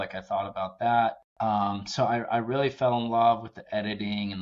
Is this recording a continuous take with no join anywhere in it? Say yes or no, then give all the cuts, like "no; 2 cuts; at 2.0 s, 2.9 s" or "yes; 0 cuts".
no; 1 cut; at 1.3 s